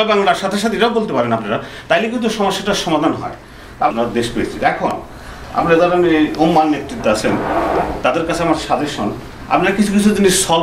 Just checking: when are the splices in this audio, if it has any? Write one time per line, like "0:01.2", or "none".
0:03.9